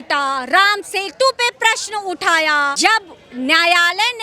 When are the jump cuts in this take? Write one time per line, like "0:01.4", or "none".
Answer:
0:02.8